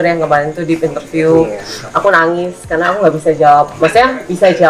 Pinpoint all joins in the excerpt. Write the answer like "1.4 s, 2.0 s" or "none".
none